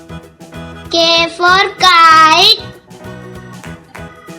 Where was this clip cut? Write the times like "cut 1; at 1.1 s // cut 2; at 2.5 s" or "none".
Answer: cut 1; at 0.9 s // cut 2; at 3.0 s